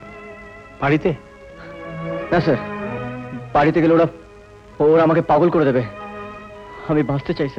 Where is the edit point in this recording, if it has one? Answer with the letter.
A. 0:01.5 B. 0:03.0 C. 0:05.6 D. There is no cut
D